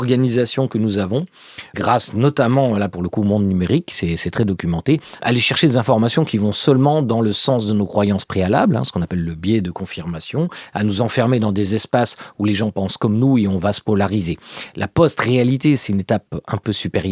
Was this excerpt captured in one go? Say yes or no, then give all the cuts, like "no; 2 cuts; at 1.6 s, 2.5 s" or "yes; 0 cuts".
no; 2 cuts; at 1.6 s, 5.1 s